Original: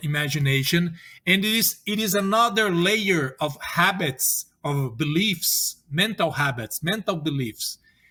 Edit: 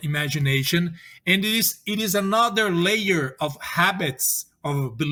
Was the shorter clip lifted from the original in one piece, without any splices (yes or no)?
yes